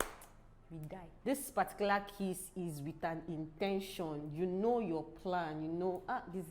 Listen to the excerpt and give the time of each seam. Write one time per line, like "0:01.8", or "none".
0:01.1